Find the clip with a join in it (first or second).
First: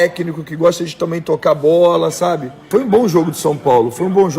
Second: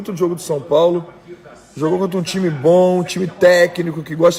first